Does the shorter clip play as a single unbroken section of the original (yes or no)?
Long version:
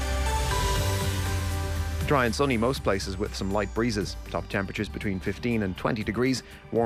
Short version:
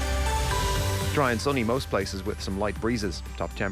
no